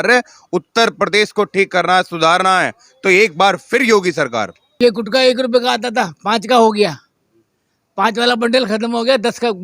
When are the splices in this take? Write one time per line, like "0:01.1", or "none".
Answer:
0:04.6